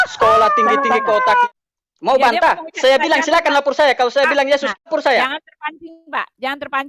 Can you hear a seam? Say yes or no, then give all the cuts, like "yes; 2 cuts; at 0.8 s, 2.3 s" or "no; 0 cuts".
yes; 2 cuts; at 1.5 s, 4.9 s